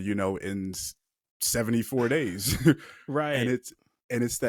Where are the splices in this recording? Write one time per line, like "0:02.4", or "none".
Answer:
none